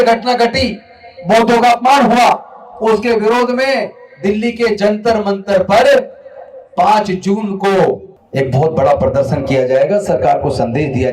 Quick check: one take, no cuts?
no; 1 cut; at 8.2 s

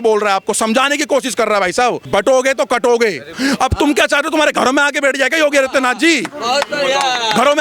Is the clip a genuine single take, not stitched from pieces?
no; 2 cuts; at 2.0 s, 3.3 s

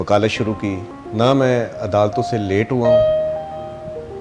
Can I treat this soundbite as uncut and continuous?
no; 1 cut; at 0.9 s

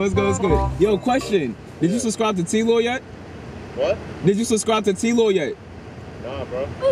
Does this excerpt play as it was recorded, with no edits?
yes; 0 cuts

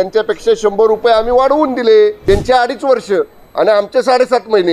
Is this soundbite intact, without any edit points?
no; 1 cut; at 2.2 s

